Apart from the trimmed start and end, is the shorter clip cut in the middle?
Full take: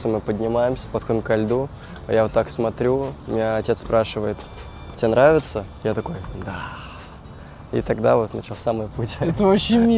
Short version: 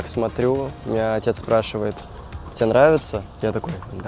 no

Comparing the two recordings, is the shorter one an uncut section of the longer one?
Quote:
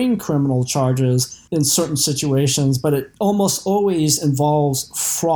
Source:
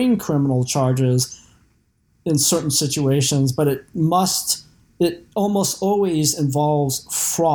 no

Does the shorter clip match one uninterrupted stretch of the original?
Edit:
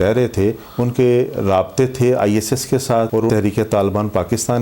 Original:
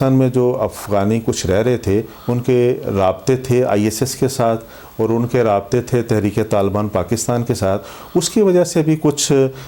no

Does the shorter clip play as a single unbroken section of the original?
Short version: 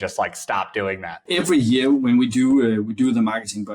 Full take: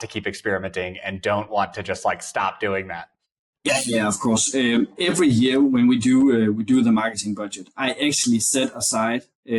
no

